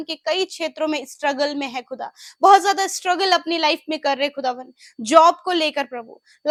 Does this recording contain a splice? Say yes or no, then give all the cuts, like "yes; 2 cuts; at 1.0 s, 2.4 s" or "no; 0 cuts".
no; 0 cuts